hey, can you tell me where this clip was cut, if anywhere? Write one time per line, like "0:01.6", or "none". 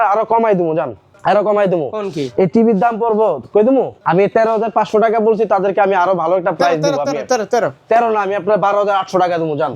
0:01.1
0:04.0